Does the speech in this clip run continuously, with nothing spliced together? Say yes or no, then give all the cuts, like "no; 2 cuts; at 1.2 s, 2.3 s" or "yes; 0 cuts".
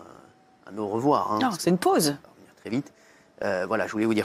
yes; 0 cuts